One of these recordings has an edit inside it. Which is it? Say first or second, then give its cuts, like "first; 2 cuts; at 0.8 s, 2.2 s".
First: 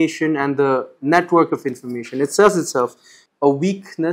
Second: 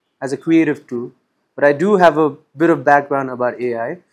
first; 1 cut; at 3.2 s